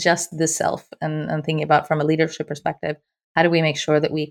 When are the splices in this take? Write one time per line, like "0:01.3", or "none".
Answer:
none